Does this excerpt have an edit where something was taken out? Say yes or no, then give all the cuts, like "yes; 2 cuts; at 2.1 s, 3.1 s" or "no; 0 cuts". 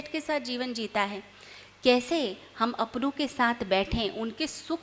no; 0 cuts